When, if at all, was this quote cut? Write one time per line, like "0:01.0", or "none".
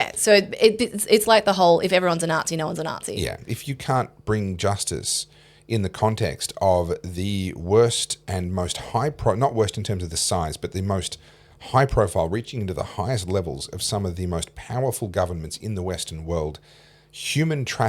0:03.5